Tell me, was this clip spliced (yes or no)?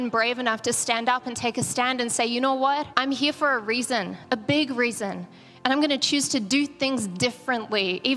yes